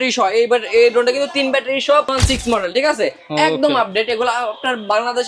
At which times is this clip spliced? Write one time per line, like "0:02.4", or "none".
0:02.1